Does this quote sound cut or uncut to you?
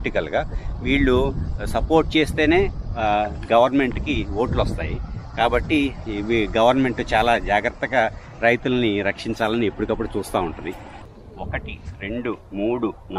cut